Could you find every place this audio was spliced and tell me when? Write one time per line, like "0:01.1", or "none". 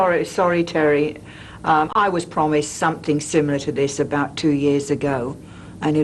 none